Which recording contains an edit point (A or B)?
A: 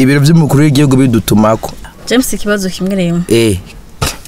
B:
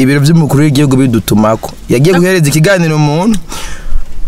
A